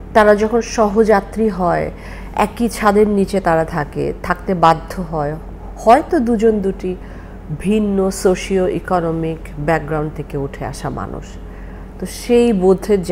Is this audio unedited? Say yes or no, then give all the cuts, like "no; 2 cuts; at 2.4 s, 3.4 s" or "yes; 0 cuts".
yes; 0 cuts